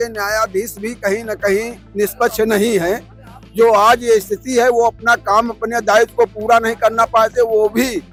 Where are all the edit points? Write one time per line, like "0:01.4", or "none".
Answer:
none

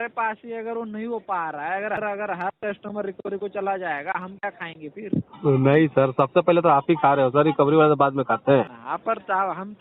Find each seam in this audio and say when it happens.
0:02.0
0:08.8

